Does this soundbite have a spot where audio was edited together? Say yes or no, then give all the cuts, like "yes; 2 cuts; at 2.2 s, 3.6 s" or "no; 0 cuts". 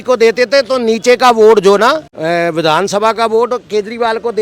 yes; 1 cut; at 2.1 s